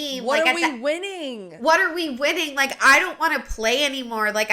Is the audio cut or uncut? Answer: uncut